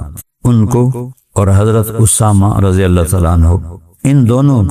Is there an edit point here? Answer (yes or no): yes